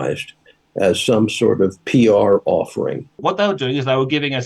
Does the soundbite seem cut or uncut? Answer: cut